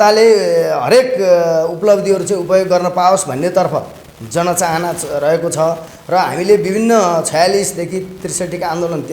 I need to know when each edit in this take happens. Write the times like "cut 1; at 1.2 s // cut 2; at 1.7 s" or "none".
none

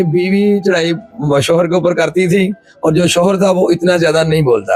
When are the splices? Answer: none

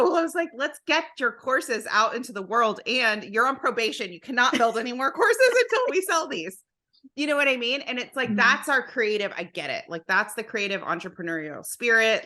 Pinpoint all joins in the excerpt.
none

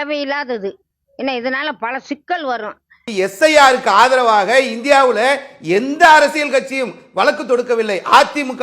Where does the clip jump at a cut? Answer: cut 1; at 3.0 s

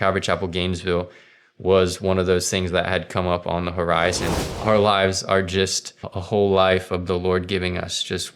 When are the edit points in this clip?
cut 1; at 4.3 s // cut 2; at 6.1 s

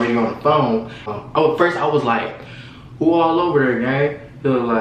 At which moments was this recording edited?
none

